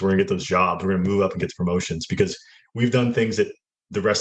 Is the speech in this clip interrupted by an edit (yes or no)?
no